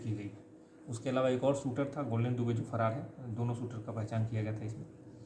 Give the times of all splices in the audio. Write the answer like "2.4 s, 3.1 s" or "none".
none

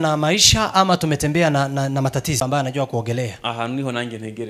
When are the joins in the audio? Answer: 2.4 s

